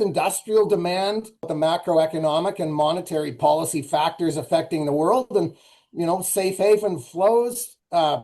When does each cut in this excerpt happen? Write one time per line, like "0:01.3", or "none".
0:01.5

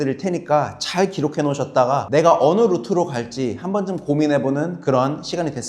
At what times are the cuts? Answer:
0:02.0

